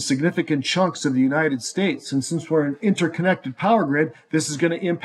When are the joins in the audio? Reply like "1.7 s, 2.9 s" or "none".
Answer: none

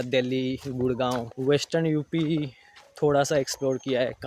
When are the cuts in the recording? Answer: 1.3 s

